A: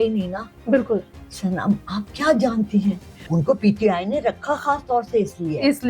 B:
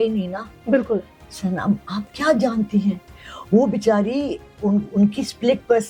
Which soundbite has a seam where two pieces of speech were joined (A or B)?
A